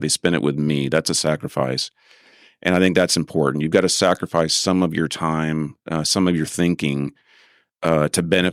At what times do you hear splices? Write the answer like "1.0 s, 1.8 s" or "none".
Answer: none